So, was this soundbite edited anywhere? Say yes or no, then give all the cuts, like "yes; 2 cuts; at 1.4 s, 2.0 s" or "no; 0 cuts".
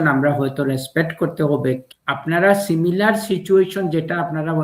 yes; 1 cut; at 1.8 s